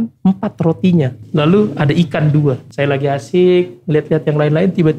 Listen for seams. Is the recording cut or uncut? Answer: cut